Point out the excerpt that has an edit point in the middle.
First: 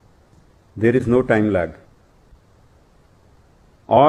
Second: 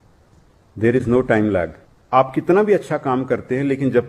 second; 1 cut; at 2.0 s

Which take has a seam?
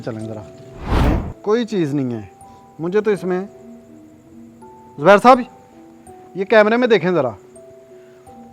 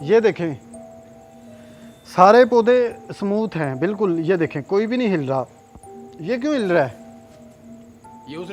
first; 1 cut; at 1.1 s

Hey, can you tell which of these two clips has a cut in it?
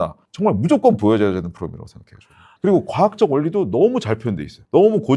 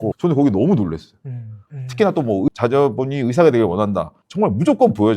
second; 1 cut; at 1.6 s

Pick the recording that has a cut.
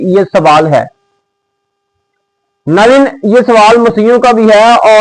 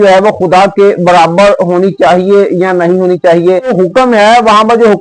second; 1 cut; at 3.7 s

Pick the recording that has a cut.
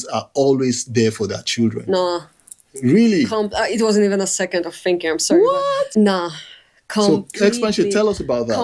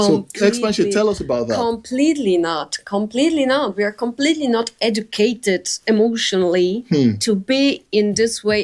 first; 1 cut; at 5.9 s

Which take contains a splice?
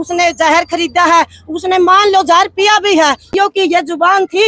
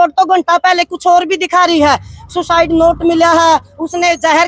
first; 1 cut; at 3.3 s

